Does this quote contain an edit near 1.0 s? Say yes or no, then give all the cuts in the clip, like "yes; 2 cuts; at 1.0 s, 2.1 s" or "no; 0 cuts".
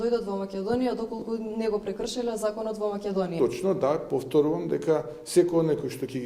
no; 1 cut; at 3.3 s